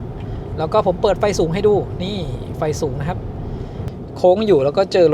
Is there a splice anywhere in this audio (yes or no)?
yes